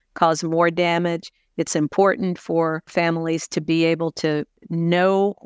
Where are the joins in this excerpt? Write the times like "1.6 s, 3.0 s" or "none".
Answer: 2.9 s, 4.6 s